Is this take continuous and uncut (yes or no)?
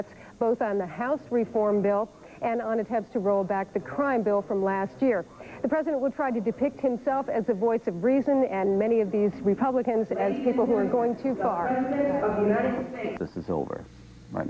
yes